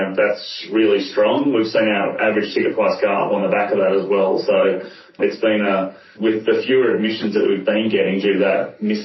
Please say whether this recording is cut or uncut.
uncut